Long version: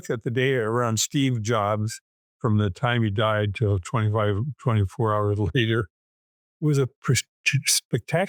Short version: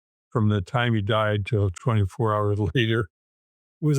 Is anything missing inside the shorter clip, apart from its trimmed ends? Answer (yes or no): yes